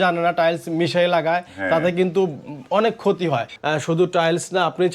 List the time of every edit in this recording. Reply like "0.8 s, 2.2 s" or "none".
3.5 s